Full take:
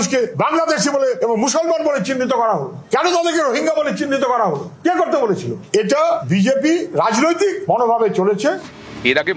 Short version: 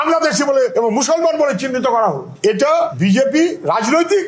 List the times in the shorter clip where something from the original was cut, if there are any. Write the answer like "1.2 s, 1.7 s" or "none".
2.3 s